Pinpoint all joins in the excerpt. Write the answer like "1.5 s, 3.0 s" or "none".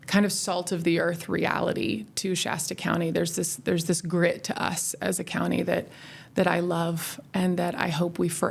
none